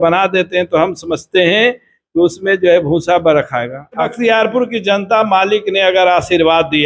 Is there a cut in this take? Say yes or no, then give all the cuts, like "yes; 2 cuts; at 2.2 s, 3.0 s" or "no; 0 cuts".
yes; 1 cut; at 4.1 s